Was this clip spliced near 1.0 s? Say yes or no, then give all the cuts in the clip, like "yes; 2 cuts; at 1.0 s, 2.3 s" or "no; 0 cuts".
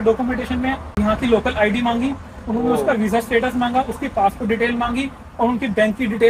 yes; 1 cut; at 1.0 s